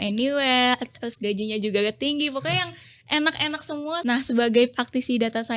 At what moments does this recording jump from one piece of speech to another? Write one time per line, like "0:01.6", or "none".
0:04.0